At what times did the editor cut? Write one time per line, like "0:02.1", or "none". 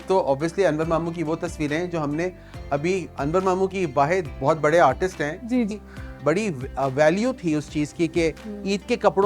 0:05.7